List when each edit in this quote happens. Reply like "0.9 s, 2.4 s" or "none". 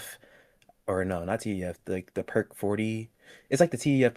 none